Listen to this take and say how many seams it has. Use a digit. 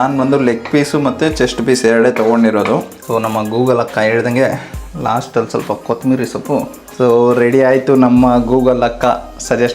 2